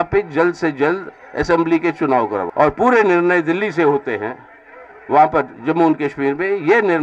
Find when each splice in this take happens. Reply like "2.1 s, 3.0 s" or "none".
2.5 s

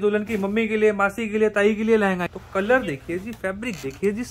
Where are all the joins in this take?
2.3 s

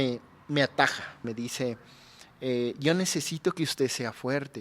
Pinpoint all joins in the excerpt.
1.2 s

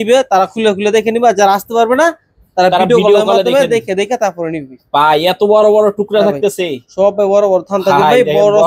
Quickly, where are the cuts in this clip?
none

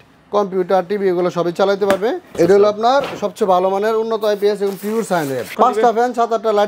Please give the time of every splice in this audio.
2.3 s, 5.5 s

